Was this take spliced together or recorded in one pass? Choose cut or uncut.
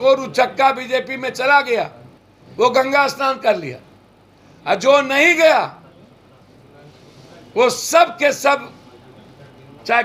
uncut